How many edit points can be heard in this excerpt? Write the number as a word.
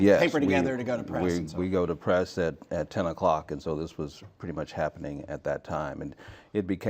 one